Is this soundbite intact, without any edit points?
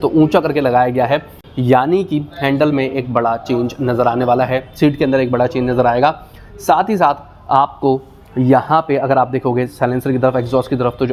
yes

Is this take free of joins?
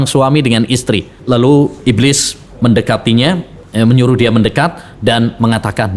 no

